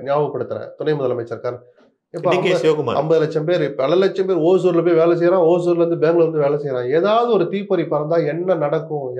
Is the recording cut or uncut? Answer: uncut